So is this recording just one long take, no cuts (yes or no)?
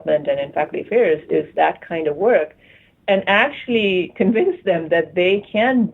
no